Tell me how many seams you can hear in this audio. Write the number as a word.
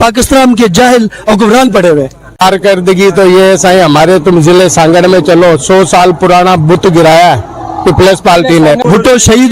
two